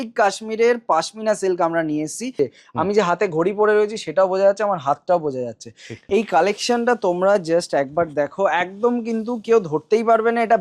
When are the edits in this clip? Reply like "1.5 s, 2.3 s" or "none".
2.3 s, 5.9 s

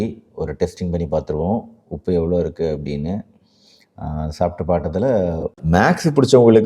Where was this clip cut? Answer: 5.6 s

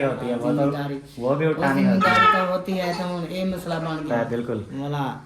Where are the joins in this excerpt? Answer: 4.1 s

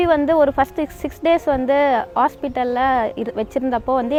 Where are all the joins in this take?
none

